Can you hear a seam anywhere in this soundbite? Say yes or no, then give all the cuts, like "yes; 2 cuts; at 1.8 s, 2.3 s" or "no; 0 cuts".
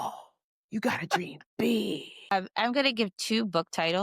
yes; 1 cut; at 2.3 s